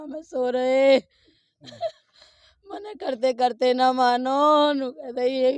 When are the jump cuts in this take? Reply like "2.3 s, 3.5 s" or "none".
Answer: none